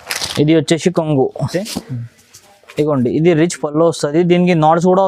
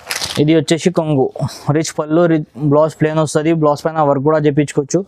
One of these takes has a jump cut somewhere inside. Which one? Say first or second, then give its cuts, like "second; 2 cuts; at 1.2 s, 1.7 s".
first; 1 cut; at 1.5 s